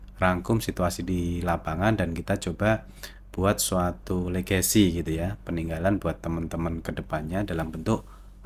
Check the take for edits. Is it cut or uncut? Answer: uncut